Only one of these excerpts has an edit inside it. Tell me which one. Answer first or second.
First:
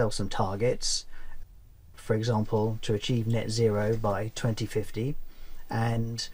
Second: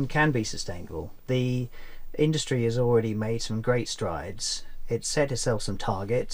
second